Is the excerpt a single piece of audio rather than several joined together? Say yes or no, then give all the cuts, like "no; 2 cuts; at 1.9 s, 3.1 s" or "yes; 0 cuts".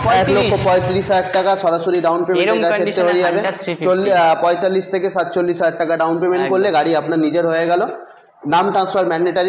yes; 0 cuts